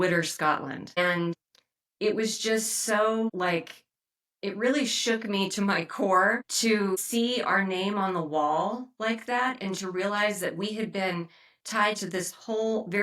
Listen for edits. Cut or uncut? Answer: cut